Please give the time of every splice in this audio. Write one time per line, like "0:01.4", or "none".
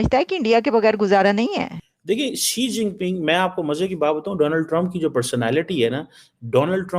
0:01.8